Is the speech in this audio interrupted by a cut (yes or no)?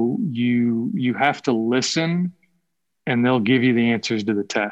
no